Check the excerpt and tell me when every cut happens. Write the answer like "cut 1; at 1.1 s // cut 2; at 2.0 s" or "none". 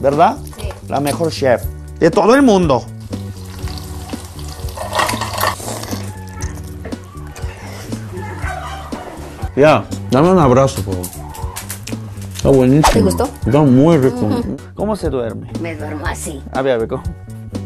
cut 1; at 5.6 s // cut 2; at 14.4 s